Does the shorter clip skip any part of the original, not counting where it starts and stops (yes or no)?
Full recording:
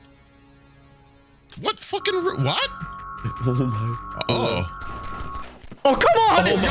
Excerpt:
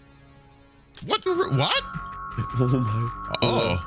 yes